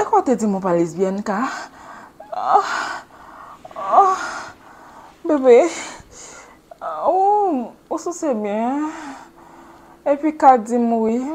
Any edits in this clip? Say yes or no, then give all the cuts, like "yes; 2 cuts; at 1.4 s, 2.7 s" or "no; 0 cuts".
no; 0 cuts